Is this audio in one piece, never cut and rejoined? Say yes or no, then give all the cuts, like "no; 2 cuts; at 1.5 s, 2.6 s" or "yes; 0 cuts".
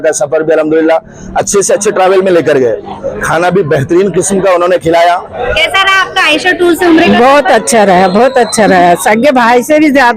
no; 1 cut; at 5.4 s